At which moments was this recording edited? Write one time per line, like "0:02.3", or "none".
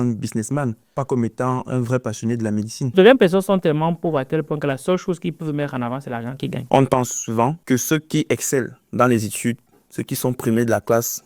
0:02.9
0:06.5
0:07.6